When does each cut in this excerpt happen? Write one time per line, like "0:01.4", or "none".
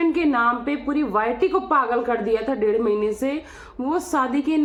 none